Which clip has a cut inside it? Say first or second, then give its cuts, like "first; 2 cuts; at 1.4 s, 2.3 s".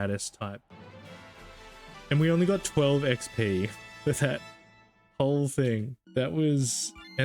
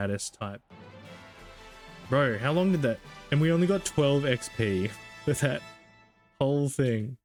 first; 2 cuts; at 1.9 s, 6.0 s